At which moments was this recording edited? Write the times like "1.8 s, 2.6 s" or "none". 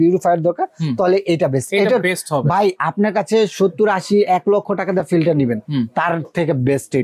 none